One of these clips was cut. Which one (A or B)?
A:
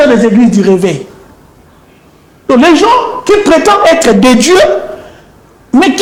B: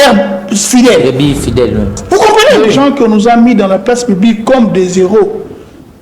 B